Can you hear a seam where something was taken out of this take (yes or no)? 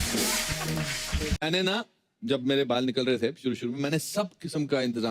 yes